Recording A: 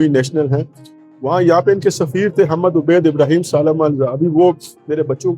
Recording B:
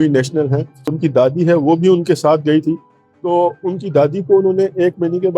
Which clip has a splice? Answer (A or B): B